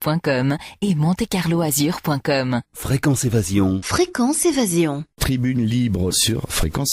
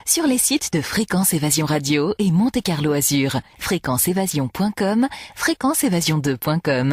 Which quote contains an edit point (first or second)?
first